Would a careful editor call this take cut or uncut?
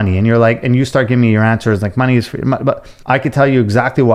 uncut